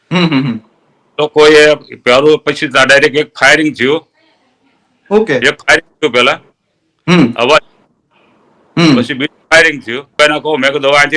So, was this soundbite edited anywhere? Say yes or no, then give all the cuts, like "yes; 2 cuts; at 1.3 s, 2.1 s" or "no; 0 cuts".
yes; 1 cut; at 10.1 s